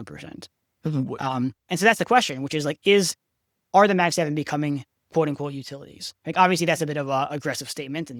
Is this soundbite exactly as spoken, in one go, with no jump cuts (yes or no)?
yes